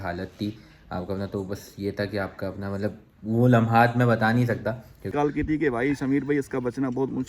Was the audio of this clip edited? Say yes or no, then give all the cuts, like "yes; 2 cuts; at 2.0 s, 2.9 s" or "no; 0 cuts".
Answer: yes; 1 cut; at 5.1 s